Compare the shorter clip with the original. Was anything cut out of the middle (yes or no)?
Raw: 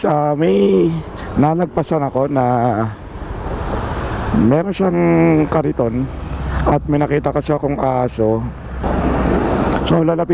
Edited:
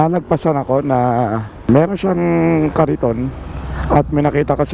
yes